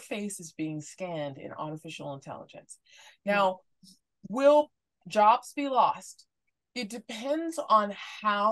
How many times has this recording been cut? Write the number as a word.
zero